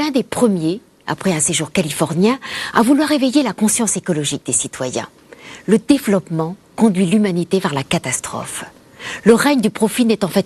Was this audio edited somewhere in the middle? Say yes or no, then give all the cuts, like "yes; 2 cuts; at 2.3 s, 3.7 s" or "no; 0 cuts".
no; 0 cuts